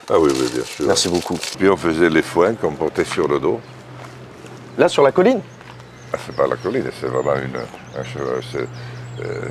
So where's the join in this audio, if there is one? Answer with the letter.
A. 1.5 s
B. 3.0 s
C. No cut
A